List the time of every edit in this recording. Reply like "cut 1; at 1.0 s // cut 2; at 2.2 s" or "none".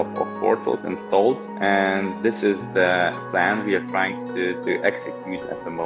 cut 1; at 1.5 s

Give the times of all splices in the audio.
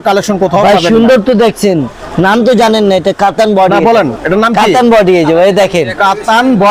none

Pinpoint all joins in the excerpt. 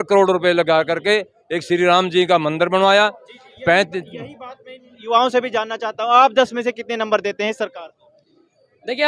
none

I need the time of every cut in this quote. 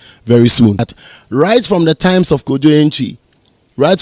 cut 1; at 0.9 s

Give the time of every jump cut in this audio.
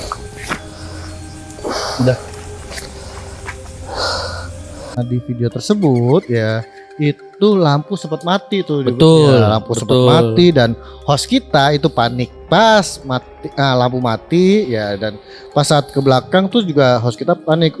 cut 1; at 5.0 s

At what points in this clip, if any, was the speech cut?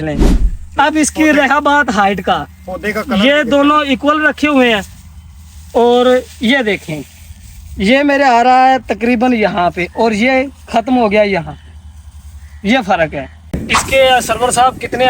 cut 1; at 13.5 s

